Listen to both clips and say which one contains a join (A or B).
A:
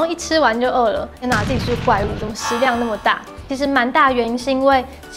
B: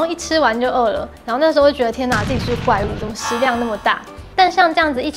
A